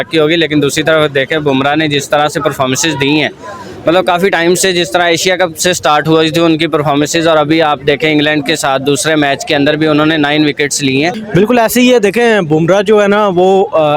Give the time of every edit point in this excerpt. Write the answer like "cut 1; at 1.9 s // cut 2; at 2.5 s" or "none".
cut 1; at 11.2 s